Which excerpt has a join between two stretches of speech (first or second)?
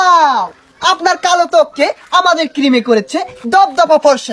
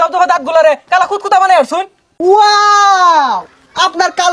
second